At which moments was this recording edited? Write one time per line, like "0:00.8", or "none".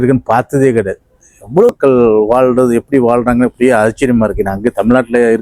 0:01.7